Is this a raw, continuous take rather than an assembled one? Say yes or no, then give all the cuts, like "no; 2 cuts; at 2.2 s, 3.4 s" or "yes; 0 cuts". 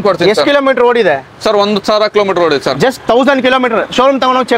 yes; 0 cuts